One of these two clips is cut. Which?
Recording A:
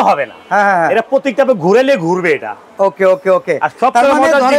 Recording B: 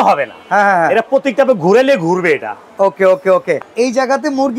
B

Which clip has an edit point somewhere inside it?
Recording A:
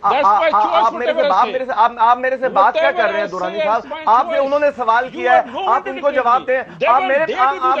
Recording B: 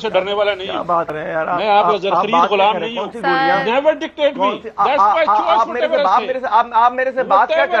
B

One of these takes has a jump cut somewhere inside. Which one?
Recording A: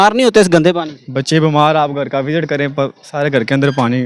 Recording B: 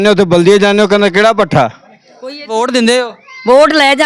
B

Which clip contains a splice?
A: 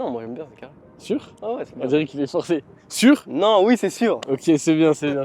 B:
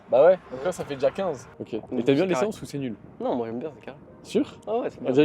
B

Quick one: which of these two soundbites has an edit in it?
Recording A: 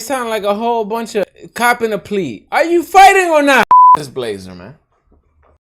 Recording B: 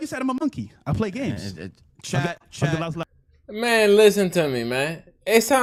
A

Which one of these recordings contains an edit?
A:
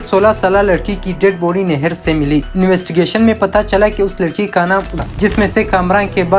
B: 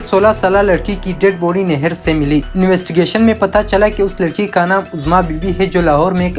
A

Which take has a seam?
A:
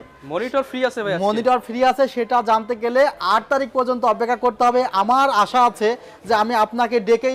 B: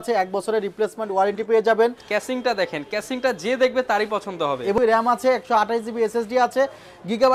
B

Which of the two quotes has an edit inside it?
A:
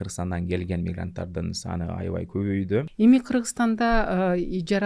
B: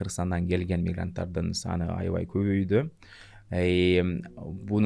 A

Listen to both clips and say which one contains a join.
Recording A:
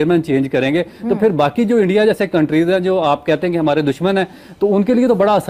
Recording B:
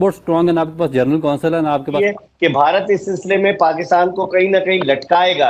B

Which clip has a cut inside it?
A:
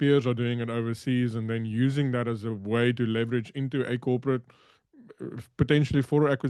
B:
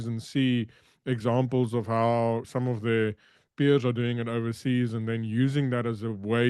B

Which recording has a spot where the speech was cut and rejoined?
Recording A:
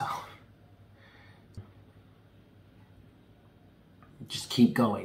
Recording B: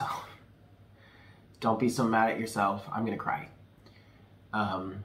A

